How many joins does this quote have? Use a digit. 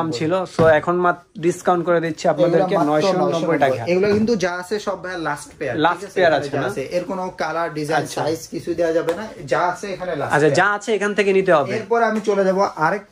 0